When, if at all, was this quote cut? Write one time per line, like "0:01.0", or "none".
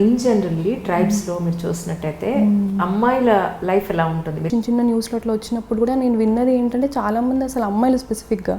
0:04.5